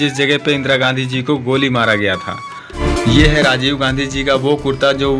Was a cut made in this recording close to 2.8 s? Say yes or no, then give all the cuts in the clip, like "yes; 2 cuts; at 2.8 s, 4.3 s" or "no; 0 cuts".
yes; 1 cut; at 2.8 s